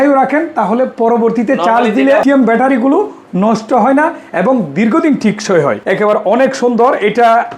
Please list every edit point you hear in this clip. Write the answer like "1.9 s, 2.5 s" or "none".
2.2 s, 5.8 s